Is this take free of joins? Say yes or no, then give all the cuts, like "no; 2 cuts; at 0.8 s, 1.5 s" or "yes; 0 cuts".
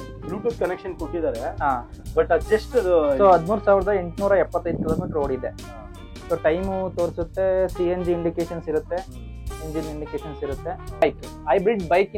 no; 1 cut; at 11.0 s